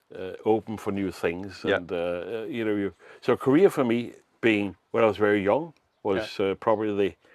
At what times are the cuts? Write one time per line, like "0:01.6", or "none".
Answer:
none